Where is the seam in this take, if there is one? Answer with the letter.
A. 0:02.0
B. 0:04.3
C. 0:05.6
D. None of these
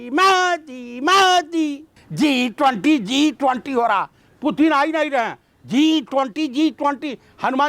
A